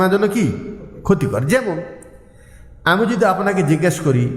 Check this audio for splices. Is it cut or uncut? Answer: uncut